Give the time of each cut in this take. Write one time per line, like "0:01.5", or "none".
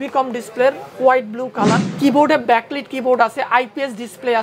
0:01.9